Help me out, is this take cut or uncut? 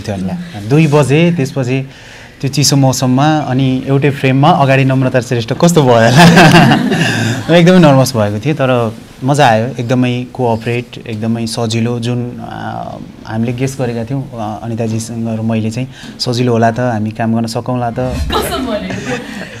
cut